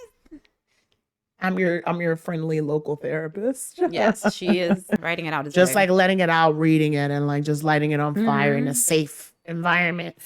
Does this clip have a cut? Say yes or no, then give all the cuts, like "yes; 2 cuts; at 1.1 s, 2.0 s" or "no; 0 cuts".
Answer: yes; 1 cut; at 5.1 s